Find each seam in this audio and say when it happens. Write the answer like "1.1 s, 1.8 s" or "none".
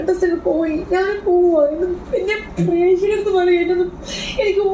none